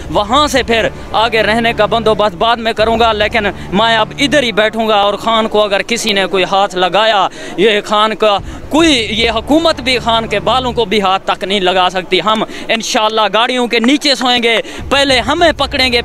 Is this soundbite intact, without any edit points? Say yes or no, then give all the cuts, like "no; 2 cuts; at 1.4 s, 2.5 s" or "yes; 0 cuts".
yes; 0 cuts